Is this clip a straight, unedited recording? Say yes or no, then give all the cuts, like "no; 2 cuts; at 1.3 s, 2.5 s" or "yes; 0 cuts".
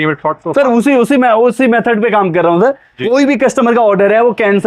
yes; 0 cuts